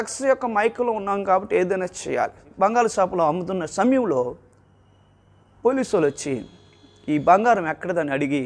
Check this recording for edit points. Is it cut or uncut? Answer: cut